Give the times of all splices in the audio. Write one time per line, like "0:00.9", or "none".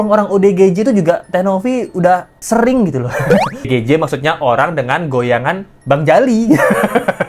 0:03.7